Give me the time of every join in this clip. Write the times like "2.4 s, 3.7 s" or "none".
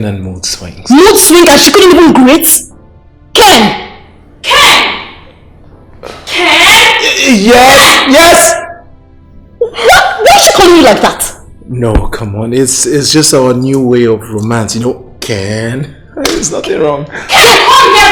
none